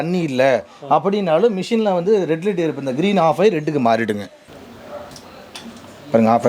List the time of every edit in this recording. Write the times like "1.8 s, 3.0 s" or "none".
4.5 s